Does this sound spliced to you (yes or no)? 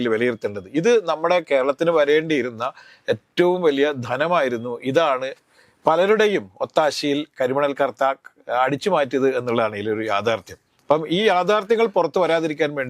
no